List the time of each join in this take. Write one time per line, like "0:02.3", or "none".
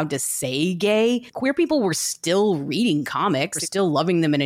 0:01.3
0:03.6

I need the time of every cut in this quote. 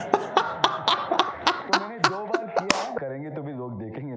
0:03.0

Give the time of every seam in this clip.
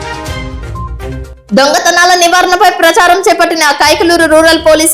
0:01.3

